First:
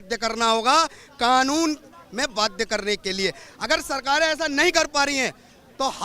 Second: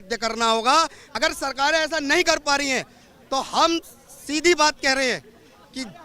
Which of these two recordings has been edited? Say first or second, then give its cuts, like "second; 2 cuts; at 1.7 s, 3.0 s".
second; 1 cut; at 1.0 s